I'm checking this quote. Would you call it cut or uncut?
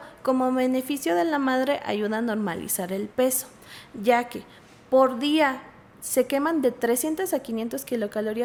uncut